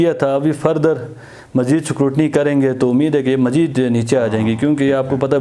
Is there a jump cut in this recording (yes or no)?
no